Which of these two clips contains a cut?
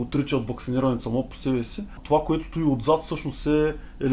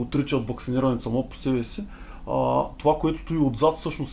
first; 1 cut; at 2.0 s

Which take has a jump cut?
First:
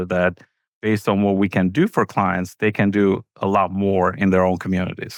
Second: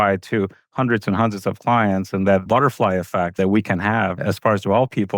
second; 1 cut; at 3.4 s

